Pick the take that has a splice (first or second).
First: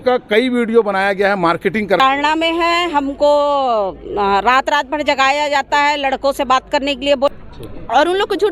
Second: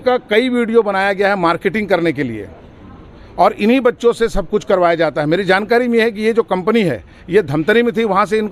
first